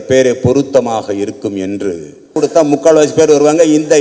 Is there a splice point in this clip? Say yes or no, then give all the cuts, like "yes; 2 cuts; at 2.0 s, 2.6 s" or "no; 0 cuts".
yes; 1 cut; at 2.3 s